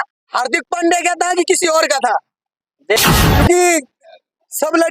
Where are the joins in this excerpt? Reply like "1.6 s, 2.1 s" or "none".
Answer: 3.0 s